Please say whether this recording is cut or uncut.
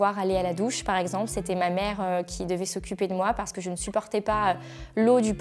uncut